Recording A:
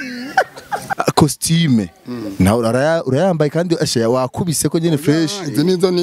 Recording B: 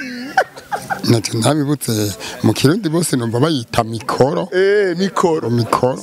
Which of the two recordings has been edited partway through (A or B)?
A